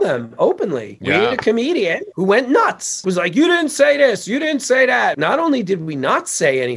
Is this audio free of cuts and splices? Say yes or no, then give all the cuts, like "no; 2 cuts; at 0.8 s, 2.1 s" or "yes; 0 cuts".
no; 4 cuts; at 0.9 s, 2.1 s, 3.0 s, 5.2 s